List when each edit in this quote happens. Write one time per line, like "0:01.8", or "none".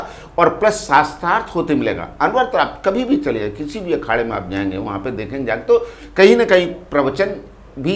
none